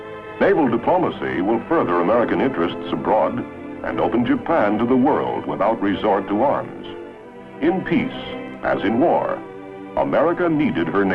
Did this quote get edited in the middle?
yes; 1 cut; at 7.3 s

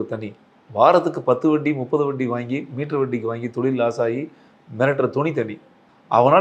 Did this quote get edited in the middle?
no; 0 cuts

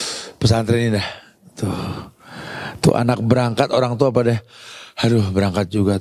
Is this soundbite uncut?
yes; 0 cuts

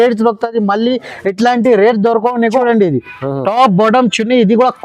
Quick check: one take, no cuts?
no; 1 cut; at 2.6 s

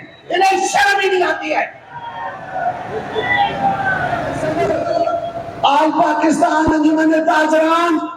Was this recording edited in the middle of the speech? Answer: yes; 1 cut; at 4.4 s

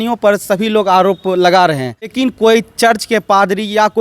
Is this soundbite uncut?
no; 1 cut; at 2.1 s

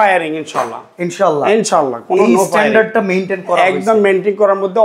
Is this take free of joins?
yes; 0 cuts

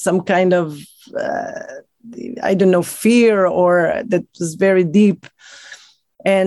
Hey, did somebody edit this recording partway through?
no; 0 cuts

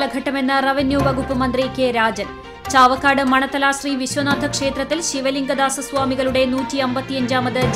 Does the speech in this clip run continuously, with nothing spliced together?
yes; 0 cuts

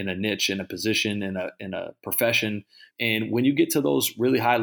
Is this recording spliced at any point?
yes; 1 cut; at 2.9 s

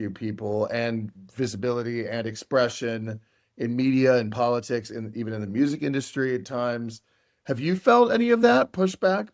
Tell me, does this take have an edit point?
no; 0 cuts

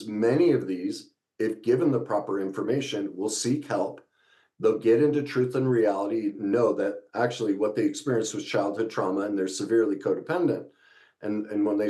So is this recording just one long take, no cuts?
yes; 0 cuts

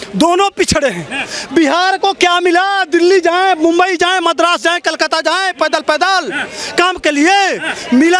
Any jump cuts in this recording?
no; 0 cuts

